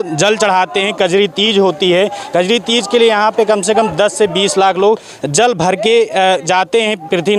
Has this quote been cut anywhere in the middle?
no; 0 cuts

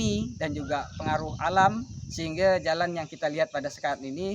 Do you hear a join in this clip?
no; 0 cuts

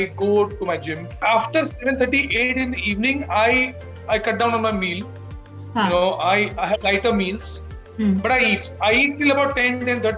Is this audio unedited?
no; 1 cut; at 1.2 s

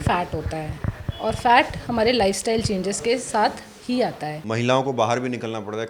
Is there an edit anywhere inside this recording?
yes; 1 cut; at 4.3 s

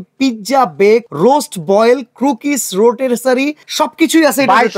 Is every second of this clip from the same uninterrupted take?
no; 2 cuts; at 1.1 s, 3.6 s

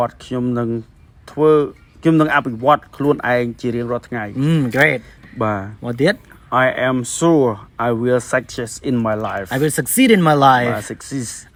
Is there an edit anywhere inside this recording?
no; 0 cuts

